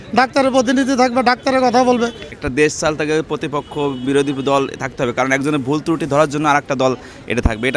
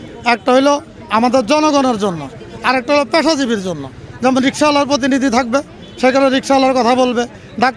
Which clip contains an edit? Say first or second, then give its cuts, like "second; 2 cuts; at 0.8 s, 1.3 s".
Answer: first; 1 cut; at 2.4 s